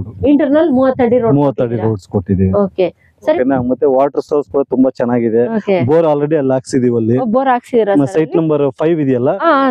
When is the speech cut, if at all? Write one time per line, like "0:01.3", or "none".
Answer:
0:03.4